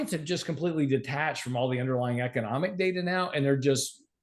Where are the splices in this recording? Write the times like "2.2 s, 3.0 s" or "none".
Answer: none

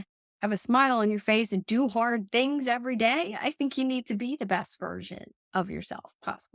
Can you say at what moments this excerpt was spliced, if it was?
none

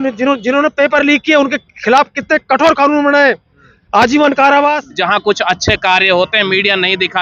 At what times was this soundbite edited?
4.9 s

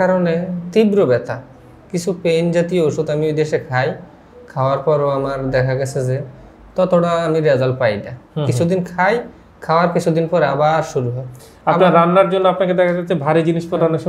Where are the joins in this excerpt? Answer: none

